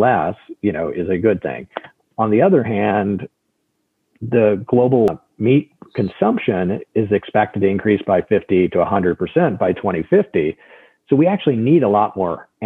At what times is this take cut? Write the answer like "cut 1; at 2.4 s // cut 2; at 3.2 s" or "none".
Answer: cut 1; at 5.1 s